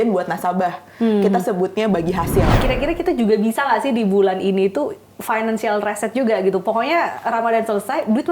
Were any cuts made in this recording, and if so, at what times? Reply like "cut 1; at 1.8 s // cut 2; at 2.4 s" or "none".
cut 1; at 2.6 s